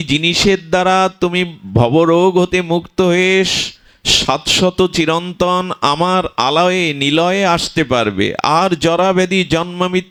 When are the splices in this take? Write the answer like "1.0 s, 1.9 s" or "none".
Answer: none